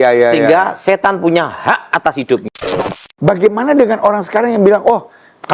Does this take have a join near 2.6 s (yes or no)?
yes